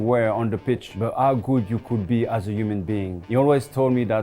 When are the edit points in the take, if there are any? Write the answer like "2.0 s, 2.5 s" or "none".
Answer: 0.9 s, 3.2 s